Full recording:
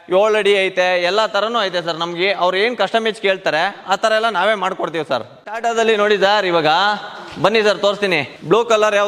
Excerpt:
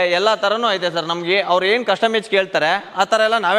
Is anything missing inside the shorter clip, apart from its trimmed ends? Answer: no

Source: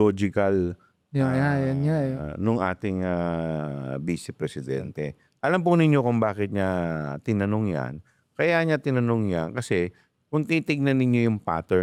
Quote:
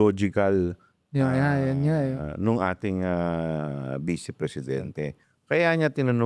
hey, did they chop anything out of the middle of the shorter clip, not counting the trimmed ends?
yes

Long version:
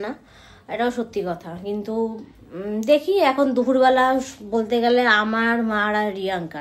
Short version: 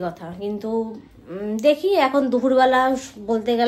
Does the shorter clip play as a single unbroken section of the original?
yes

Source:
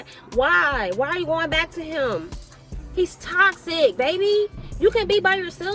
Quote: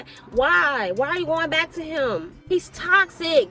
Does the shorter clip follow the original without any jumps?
no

